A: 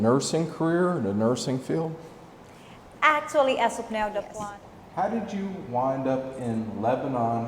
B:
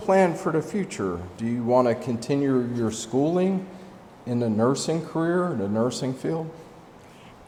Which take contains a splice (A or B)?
A